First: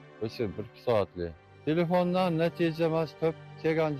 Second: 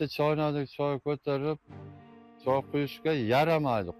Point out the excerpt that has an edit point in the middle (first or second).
first